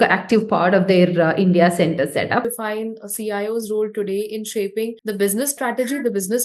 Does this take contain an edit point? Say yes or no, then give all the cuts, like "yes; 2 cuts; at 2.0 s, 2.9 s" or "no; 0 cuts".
yes; 1 cut; at 2.5 s